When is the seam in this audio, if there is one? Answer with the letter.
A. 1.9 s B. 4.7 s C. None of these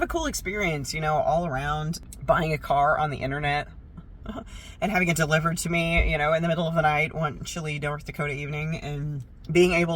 A